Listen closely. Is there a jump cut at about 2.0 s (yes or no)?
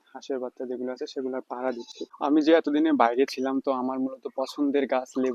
yes